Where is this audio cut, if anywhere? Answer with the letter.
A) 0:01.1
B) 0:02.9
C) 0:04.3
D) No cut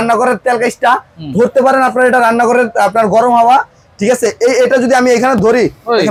D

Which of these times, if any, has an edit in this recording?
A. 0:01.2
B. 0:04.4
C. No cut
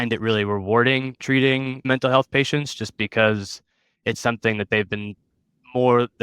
A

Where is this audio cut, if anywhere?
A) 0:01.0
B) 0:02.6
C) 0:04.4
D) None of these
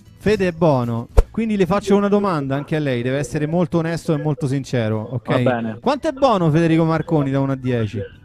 A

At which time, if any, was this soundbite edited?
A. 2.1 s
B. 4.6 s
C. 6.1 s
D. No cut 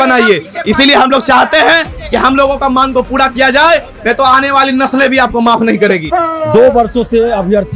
C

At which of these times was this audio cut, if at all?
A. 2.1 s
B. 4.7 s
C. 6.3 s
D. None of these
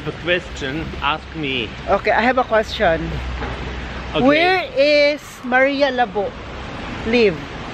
D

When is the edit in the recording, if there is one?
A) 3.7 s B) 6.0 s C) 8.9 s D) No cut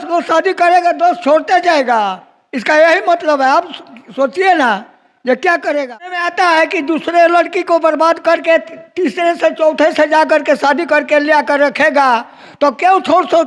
B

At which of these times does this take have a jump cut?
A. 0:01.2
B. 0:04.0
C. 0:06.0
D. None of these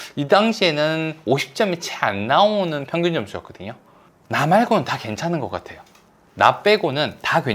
B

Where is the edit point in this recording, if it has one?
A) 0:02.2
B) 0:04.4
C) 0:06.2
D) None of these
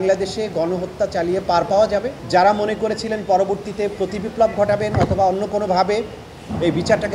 A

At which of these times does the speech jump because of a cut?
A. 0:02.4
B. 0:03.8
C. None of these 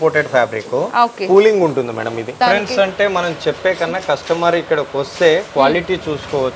A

